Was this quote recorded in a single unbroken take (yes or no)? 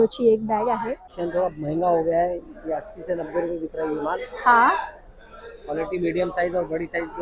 no